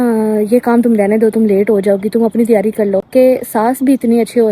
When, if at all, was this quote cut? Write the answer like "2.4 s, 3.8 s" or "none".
3.1 s